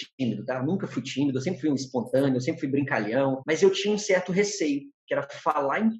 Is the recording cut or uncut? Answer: cut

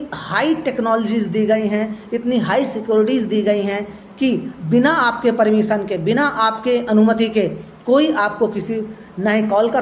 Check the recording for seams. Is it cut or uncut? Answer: uncut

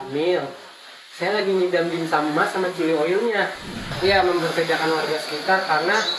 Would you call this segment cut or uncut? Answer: cut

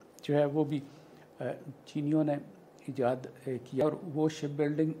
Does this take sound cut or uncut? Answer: cut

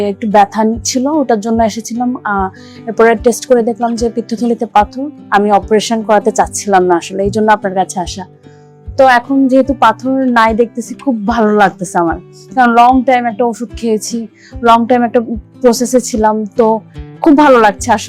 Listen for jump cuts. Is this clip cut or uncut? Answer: uncut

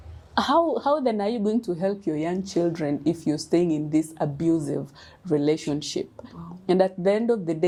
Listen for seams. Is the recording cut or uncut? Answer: uncut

